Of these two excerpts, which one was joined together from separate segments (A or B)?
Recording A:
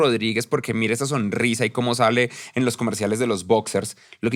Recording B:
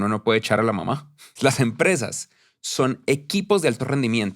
B